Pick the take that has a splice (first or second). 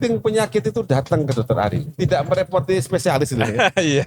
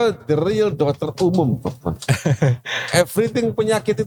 first